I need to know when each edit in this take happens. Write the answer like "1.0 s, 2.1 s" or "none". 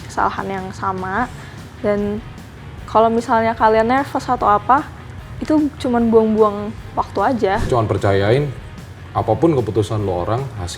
7.7 s

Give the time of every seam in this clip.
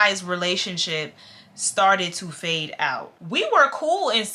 3.1 s

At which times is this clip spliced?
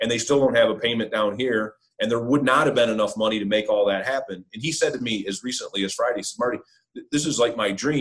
none

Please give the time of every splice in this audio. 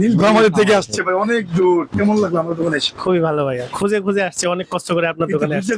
1.9 s

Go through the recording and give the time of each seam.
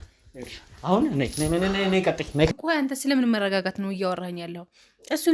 2.5 s

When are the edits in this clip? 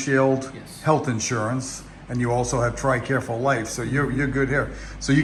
none

